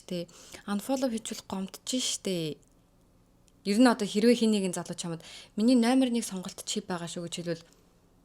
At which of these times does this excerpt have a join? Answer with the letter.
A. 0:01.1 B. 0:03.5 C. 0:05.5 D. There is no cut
B